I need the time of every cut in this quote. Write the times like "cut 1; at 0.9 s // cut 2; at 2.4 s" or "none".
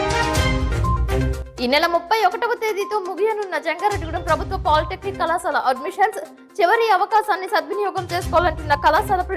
cut 1; at 1.1 s